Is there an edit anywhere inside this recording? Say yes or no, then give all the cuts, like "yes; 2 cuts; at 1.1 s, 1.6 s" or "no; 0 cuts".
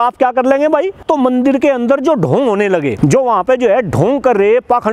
yes; 2 cuts; at 1.0 s, 2.9 s